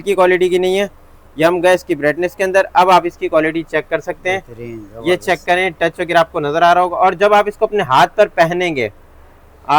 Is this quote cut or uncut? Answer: uncut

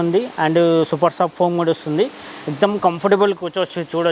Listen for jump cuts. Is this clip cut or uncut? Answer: uncut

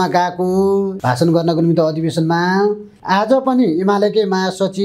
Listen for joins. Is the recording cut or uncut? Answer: cut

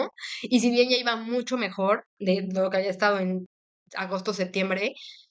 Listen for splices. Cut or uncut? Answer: uncut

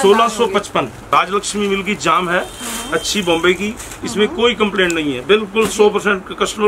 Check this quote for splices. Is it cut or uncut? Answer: cut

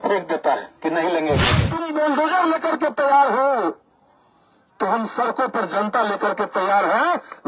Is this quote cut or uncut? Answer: cut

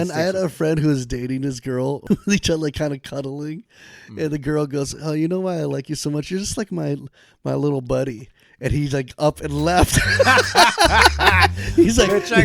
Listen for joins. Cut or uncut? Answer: cut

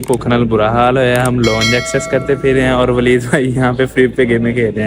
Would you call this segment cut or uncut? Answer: uncut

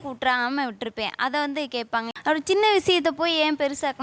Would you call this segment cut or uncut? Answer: cut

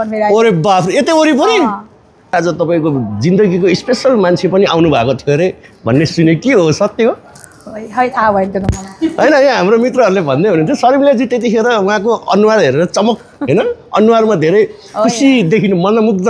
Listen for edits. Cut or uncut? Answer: cut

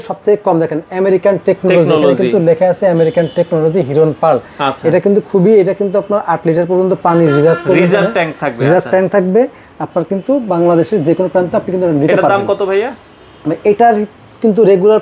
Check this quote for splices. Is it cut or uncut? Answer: uncut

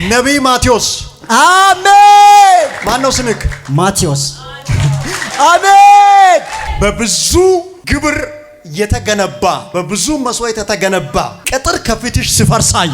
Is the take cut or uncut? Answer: cut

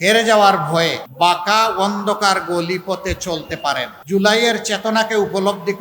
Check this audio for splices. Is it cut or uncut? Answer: cut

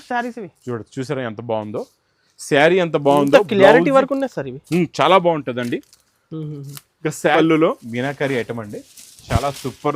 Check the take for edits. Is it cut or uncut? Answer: cut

